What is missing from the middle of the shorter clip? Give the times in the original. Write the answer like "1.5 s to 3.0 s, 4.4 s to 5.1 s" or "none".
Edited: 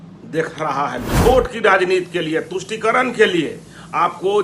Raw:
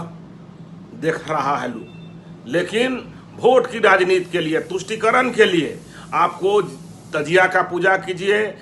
1.8 s to 3.3 s